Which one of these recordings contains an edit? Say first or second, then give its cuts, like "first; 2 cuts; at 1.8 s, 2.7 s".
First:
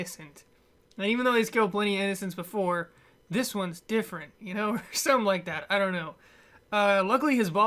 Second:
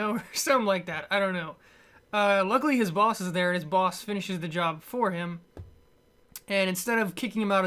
first; 1 cut; at 1.5 s